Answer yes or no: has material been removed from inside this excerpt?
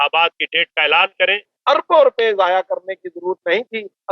yes